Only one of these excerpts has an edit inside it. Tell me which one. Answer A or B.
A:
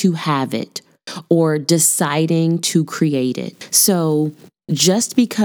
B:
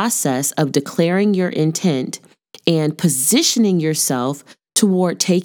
A